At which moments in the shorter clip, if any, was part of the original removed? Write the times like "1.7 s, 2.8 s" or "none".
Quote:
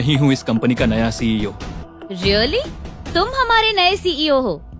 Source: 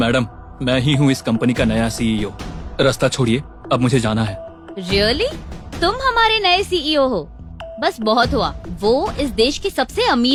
1.8 s